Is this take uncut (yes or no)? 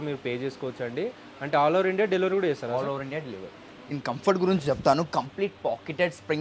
no